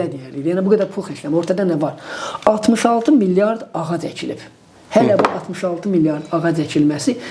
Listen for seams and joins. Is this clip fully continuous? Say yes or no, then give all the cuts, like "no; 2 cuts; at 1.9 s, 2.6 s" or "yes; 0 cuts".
yes; 0 cuts